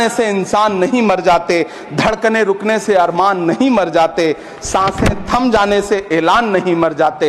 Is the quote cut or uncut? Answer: uncut